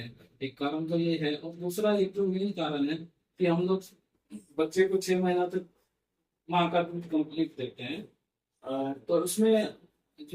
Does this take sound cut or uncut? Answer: uncut